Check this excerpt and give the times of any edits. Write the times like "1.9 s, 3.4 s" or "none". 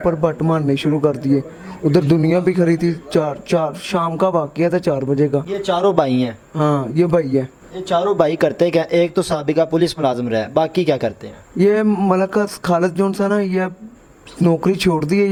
none